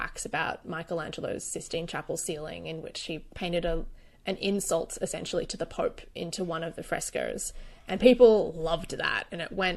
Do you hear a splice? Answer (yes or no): no